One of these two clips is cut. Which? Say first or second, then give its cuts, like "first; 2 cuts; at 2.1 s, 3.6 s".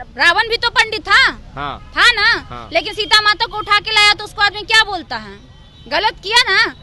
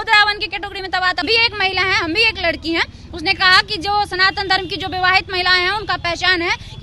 second; 1 cut; at 1.2 s